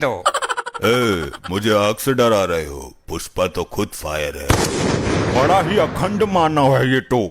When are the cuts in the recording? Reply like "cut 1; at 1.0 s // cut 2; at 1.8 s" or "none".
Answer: none